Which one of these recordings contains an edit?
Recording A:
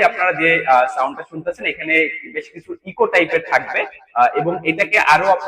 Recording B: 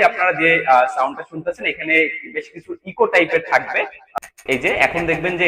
B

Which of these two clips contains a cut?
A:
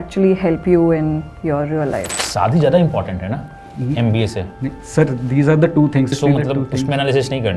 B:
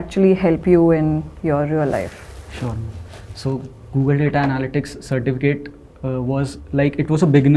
A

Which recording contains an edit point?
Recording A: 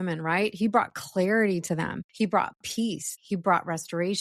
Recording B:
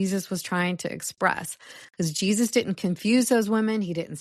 A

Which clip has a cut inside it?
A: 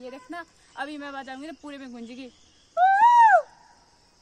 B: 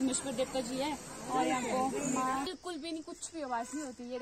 B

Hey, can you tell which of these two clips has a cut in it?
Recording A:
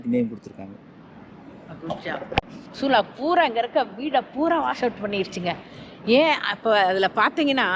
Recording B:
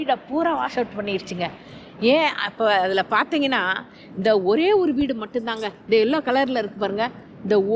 A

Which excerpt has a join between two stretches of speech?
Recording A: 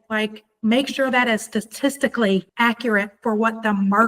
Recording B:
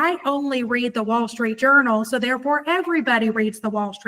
A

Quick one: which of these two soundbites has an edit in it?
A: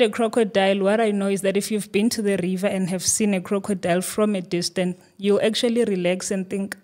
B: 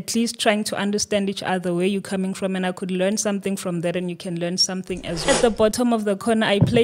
B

